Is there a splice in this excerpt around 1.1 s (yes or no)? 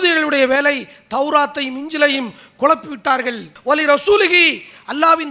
no